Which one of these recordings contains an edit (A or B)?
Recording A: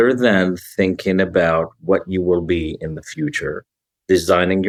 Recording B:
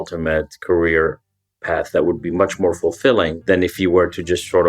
B